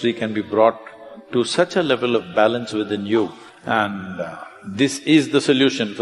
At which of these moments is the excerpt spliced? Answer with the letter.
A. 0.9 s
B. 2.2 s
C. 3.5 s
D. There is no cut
C